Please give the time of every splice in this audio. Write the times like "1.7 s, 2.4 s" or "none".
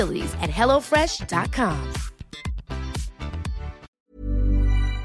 3.9 s